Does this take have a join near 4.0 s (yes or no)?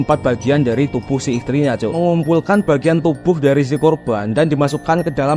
no